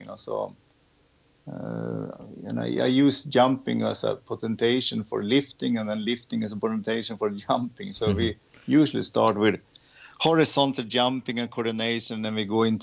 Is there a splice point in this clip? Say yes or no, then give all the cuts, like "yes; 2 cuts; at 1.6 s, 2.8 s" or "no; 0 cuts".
no; 0 cuts